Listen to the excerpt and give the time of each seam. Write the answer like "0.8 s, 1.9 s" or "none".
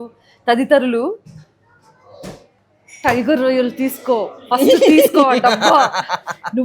none